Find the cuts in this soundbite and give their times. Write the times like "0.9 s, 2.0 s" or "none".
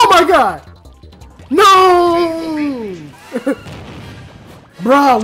3.2 s

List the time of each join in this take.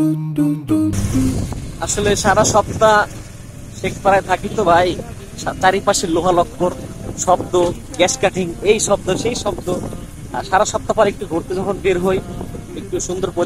1.4 s

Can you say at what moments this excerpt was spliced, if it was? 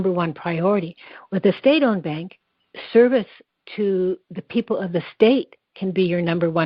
none

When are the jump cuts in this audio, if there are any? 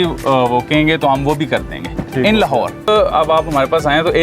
2.9 s

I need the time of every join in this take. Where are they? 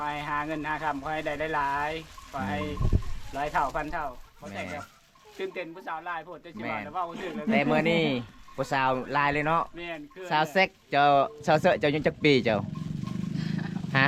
none

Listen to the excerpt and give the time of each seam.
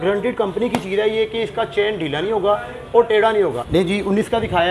3.6 s

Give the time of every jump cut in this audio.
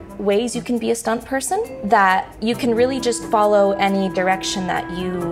1.8 s, 2.3 s

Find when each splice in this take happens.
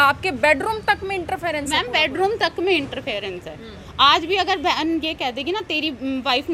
none

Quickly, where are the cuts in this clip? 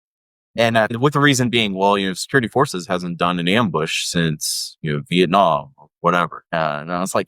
0.9 s, 6.4 s

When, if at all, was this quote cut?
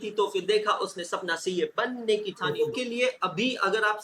2.5 s

